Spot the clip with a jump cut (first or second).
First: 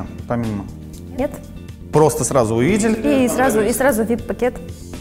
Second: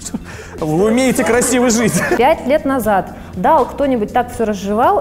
second